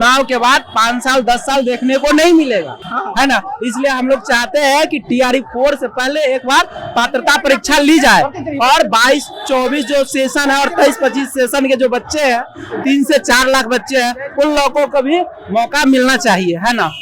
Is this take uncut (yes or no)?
yes